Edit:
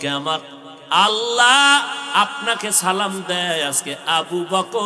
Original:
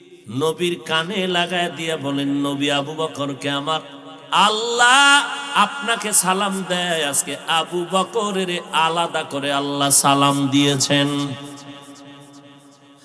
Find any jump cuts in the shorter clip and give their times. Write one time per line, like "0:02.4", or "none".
none